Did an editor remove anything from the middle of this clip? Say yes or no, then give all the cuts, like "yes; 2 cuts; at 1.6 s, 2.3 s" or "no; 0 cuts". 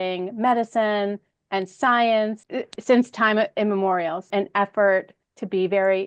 yes; 2 cuts; at 2.4 s, 4.3 s